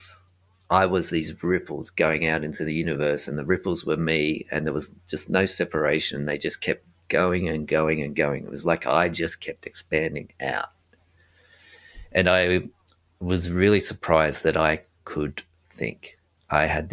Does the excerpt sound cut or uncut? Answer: uncut